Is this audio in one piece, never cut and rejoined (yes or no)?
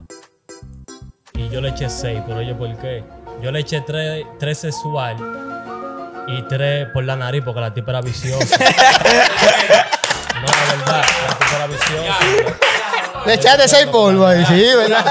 yes